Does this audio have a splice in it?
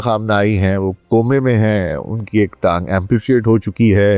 no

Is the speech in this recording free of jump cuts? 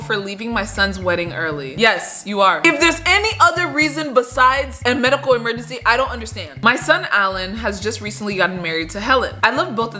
yes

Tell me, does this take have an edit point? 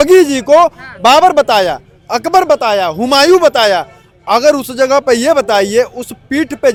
no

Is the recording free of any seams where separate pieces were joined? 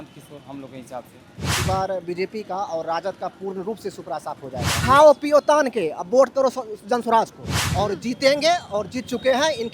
no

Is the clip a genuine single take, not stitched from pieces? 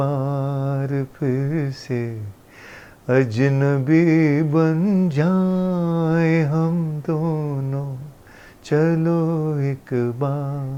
yes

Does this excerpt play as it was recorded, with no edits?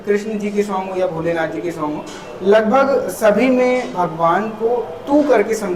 yes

